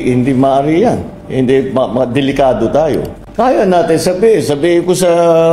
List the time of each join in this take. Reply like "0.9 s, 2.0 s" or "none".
3.2 s